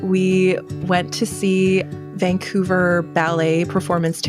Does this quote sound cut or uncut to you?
cut